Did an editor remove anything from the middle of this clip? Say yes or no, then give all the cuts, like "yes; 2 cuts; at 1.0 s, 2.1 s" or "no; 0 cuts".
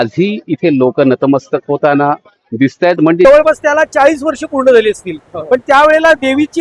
yes; 1 cut; at 3.2 s